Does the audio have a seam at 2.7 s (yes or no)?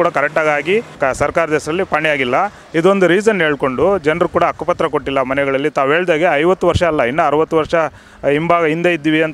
no